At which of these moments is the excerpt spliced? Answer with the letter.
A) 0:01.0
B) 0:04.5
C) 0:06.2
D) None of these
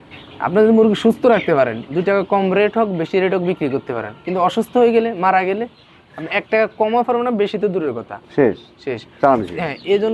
D